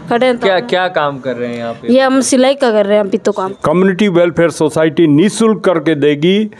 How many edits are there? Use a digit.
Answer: 1